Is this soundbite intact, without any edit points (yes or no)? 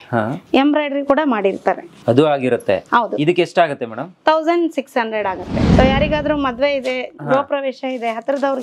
no